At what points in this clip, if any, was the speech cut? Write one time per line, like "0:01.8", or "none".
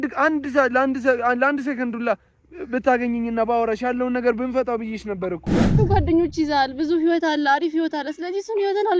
0:05.7